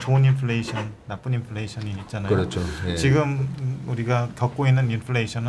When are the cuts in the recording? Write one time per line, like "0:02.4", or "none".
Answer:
none